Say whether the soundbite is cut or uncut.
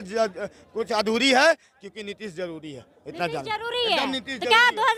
uncut